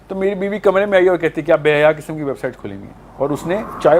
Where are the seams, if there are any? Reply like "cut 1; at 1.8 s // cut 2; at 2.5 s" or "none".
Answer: none

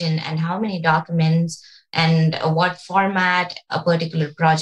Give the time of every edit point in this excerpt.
cut 1; at 3.7 s

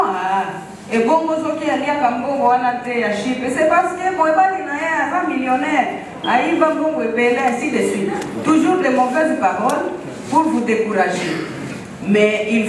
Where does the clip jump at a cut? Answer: none

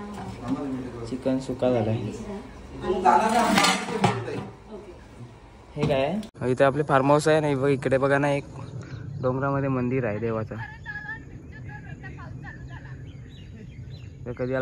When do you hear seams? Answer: cut 1; at 6.3 s

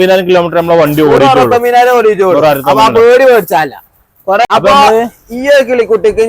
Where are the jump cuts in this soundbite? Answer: cut 1; at 4.5 s

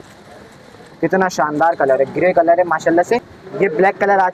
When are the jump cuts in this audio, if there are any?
cut 1; at 3.2 s

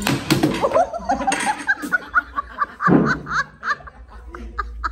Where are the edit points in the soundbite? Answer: none

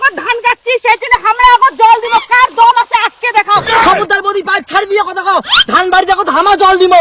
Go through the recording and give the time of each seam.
none

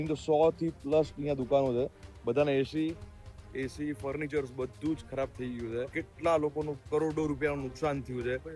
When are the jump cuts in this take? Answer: cut 1; at 6.0 s

